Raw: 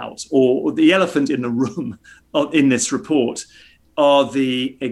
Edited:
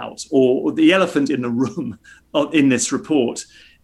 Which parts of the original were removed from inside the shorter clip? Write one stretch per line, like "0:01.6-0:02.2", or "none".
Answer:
none